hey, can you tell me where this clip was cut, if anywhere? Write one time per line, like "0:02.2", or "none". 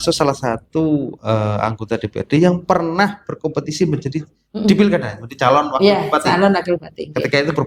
none